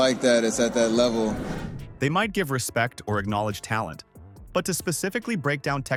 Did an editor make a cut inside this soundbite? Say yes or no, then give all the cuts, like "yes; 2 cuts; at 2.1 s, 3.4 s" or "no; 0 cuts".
no; 0 cuts